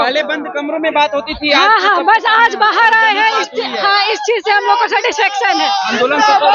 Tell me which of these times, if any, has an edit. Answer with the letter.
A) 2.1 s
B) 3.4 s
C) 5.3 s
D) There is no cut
D